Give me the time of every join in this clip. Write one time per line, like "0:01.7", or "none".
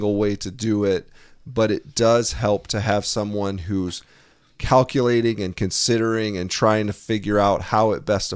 none